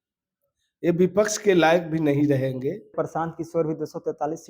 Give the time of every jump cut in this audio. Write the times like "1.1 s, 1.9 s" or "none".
2.9 s

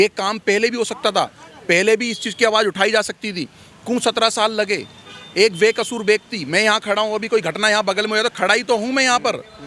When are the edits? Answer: none

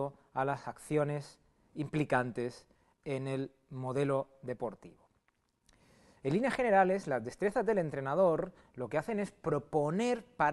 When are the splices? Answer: none

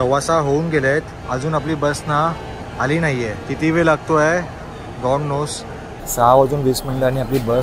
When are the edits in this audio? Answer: 1.2 s, 3.4 s, 6.0 s

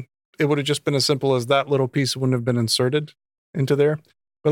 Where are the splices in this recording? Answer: none

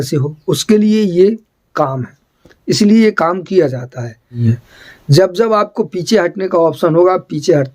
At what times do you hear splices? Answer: 4.4 s

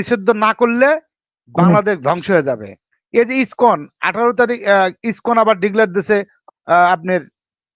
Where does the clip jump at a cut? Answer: 2.7 s

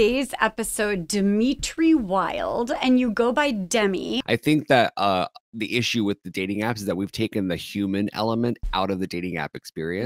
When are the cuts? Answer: 4.2 s

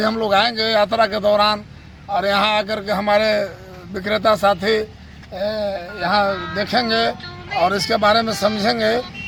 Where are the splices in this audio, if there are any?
none

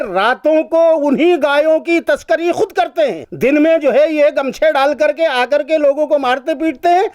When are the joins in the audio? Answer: 3.2 s

